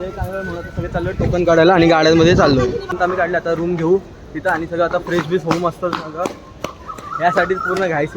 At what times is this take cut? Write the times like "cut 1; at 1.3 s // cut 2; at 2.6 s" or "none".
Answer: cut 1; at 3.0 s